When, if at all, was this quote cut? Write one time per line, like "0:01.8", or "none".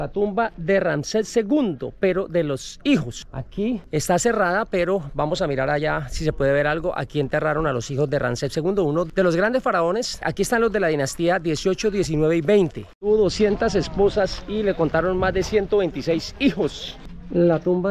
none